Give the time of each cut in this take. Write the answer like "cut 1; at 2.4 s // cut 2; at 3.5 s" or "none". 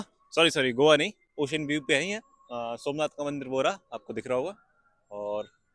none